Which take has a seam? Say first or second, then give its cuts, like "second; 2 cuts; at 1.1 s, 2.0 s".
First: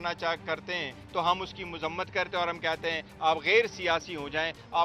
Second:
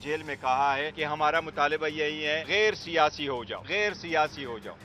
second; 3 cuts; at 0.9 s, 2.5 s, 3.6 s